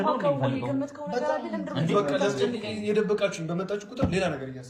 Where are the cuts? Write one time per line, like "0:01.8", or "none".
none